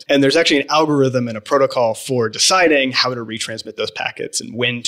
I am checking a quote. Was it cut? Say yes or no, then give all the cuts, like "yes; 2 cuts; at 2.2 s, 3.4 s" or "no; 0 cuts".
no; 0 cuts